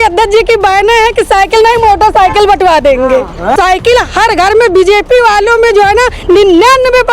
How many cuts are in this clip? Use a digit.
1